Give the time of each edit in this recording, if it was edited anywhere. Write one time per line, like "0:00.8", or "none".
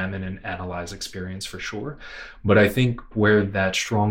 0:03.1

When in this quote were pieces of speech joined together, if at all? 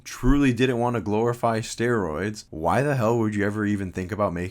0:02.4

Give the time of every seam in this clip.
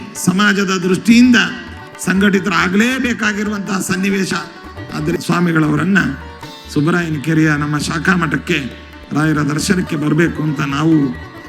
0:05.2

